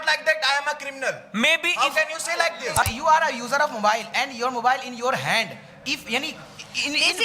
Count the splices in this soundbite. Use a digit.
1